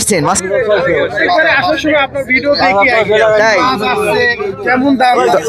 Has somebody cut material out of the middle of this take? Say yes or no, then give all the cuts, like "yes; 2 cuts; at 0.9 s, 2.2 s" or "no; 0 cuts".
no; 0 cuts